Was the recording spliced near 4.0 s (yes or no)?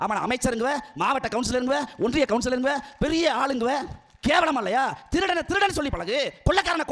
no